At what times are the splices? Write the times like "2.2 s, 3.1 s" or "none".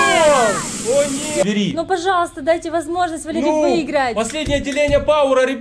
1.4 s